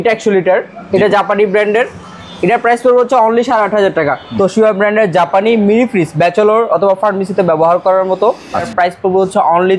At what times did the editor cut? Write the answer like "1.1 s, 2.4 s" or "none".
4.2 s, 8.7 s